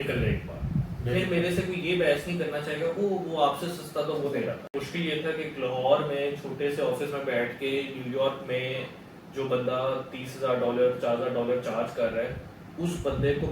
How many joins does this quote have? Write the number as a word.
one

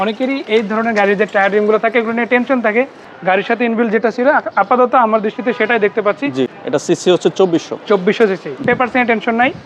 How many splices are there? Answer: three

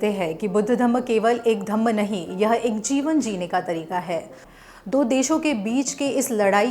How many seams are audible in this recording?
one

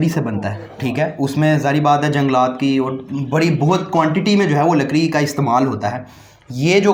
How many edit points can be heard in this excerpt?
zero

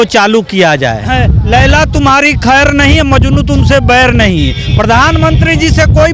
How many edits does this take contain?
one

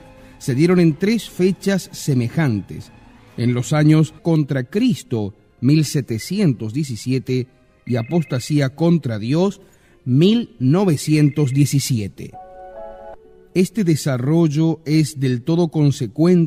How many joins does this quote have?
zero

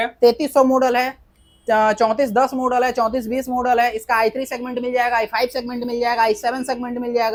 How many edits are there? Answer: zero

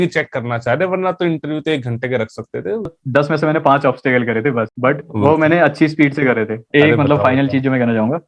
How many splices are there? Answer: three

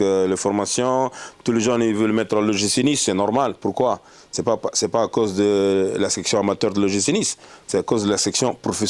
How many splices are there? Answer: zero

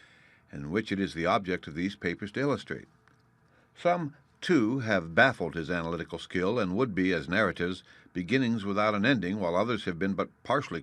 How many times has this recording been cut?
one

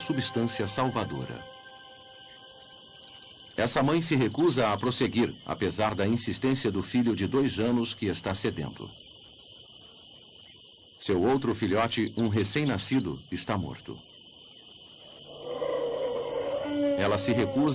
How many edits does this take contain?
one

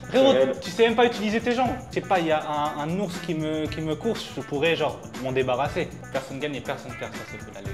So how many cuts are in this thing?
two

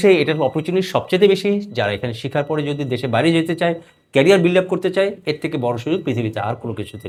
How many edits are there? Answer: zero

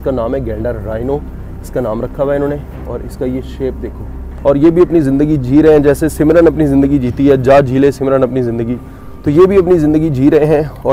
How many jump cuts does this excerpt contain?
one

